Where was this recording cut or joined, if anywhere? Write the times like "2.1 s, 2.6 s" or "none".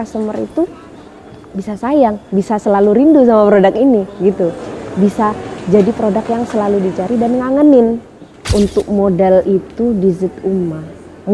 8.3 s